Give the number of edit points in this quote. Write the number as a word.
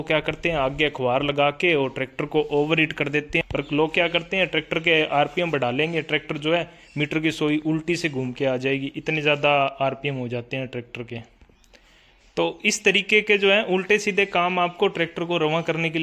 one